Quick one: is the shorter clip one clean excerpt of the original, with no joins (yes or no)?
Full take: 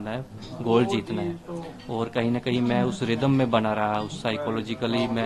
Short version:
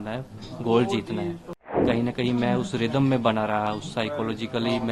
no